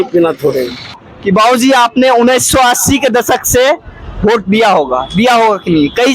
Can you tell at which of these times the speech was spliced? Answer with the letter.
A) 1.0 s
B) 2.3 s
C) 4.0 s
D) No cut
A